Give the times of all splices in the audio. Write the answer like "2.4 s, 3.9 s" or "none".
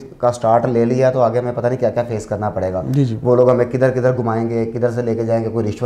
none